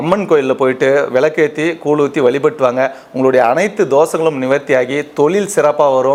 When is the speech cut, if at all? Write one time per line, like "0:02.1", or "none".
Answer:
none